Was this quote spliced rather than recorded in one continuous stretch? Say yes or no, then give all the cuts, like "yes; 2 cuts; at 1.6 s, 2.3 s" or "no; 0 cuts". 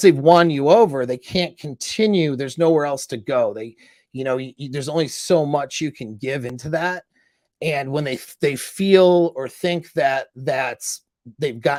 no; 0 cuts